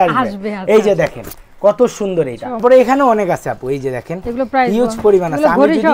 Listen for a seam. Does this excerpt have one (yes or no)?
yes